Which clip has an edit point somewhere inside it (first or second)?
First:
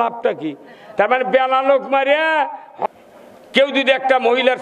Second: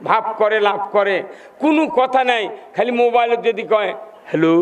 first